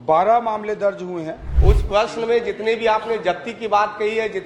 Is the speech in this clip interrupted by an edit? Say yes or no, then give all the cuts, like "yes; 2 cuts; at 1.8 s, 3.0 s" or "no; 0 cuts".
yes; 1 cut; at 1.4 s